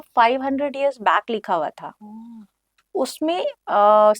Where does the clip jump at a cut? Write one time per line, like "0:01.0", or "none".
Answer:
none